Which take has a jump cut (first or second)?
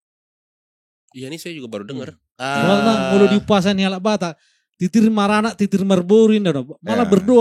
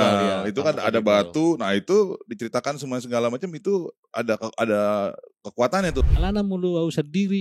second